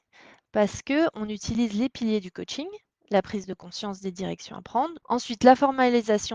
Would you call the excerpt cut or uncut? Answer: cut